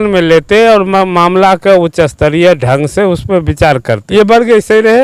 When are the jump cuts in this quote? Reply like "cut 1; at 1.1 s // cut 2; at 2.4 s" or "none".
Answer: cut 1; at 4.0 s